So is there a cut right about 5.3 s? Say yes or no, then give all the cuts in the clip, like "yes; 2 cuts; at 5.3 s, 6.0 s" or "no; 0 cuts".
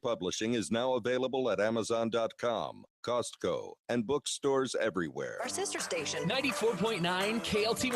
yes; 1 cut; at 5.3 s